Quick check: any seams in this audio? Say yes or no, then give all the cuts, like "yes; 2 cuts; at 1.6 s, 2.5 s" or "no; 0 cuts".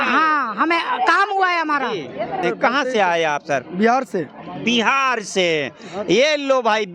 yes; 1 cut; at 2.4 s